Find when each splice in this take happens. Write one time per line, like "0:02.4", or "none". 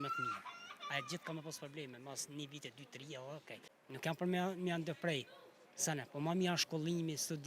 0:03.7